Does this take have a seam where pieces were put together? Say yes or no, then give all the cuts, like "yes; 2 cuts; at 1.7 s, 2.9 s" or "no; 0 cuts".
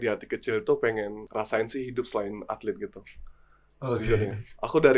yes; 1 cut; at 1.2 s